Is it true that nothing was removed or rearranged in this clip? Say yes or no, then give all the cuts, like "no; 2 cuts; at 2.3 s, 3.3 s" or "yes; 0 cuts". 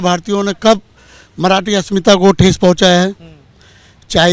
yes; 0 cuts